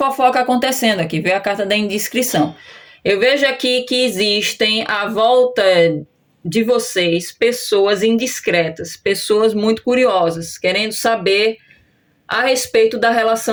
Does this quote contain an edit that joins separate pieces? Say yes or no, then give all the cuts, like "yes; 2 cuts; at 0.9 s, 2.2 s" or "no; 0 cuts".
no; 0 cuts